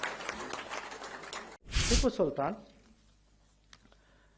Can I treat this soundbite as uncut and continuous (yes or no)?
no